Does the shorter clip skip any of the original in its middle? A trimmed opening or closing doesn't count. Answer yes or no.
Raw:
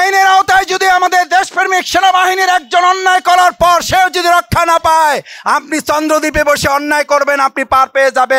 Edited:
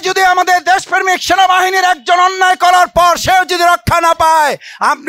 no